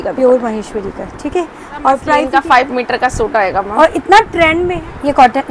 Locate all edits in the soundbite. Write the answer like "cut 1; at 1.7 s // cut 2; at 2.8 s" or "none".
cut 1; at 2.2 s // cut 2; at 4.6 s